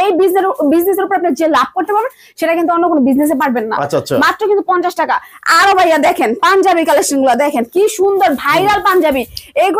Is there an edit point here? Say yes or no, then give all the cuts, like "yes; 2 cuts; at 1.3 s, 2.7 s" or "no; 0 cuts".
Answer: no; 0 cuts